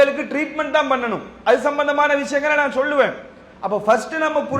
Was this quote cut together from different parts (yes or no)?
no